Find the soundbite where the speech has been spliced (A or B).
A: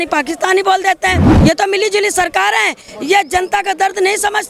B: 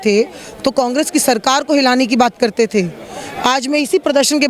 A